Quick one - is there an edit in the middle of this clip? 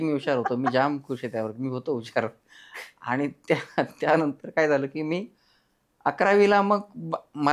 no; 0 cuts

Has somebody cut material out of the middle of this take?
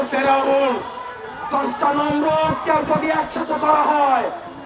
no; 0 cuts

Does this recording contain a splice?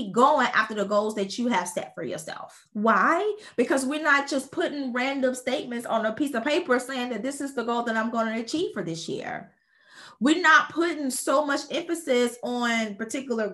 no; 0 cuts

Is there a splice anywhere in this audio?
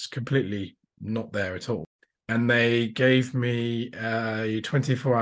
no; 0 cuts

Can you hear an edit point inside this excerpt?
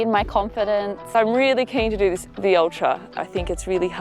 yes; 2 cuts; at 1.0 s, 3.1 s

